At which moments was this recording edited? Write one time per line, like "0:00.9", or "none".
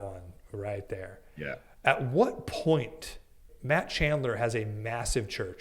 0:03.5